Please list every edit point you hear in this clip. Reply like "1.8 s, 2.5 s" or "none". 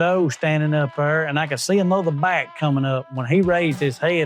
none